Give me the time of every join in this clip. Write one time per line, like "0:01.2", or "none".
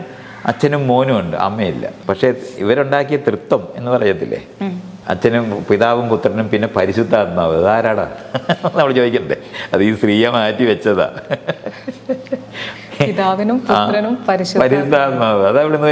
0:02.0
0:04.9